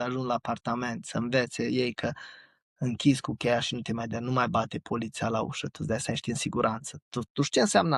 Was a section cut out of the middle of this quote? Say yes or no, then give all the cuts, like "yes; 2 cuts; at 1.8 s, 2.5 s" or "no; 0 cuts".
no; 0 cuts